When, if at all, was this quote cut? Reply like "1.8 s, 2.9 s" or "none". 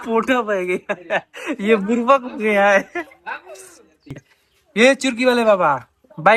4.2 s